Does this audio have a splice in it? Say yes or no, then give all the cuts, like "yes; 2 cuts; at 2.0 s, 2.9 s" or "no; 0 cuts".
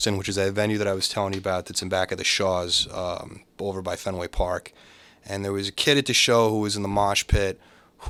no; 0 cuts